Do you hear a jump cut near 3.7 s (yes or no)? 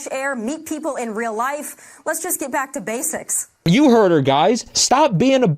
yes